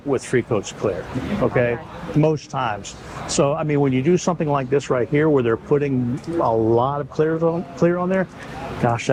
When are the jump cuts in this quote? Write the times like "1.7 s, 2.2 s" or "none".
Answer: none